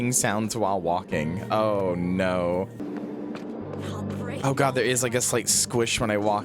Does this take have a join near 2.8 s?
yes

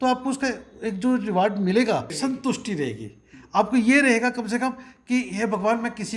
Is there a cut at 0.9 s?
no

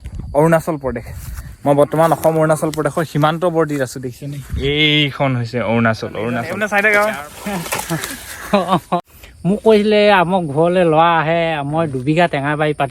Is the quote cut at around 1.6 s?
no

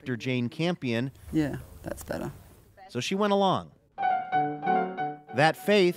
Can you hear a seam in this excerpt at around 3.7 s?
yes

